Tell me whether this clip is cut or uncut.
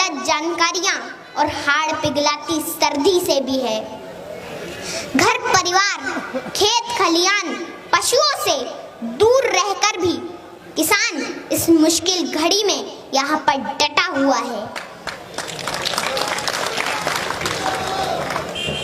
uncut